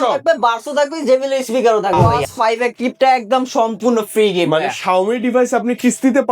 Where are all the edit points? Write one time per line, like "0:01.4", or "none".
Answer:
0:02.0